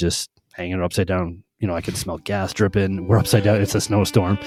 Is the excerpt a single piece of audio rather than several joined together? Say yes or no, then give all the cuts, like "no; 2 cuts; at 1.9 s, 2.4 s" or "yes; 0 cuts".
yes; 0 cuts